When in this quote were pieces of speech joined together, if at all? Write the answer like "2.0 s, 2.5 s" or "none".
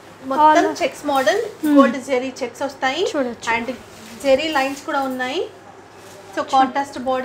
none